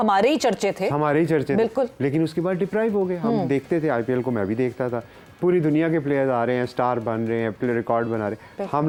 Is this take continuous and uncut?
yes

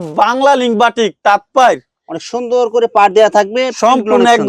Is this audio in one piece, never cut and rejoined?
yes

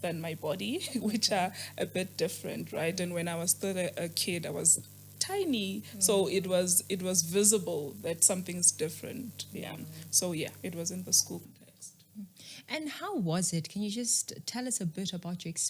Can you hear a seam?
no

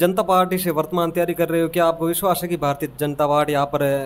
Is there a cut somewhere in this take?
no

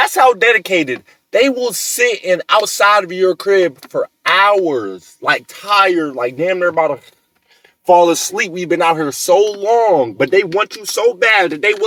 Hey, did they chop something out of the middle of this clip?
no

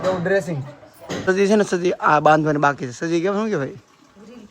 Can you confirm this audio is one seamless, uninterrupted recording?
no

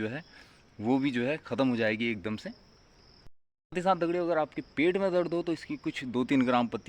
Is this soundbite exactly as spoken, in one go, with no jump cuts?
yes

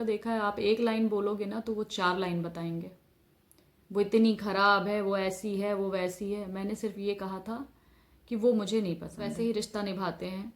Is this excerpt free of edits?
no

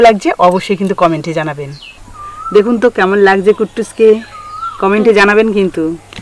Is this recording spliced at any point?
yes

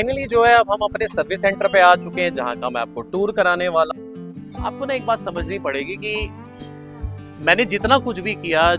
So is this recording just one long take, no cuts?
no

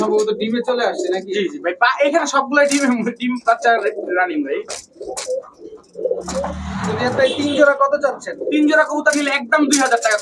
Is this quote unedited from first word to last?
yes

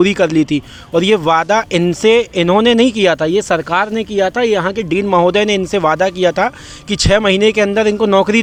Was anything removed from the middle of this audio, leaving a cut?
no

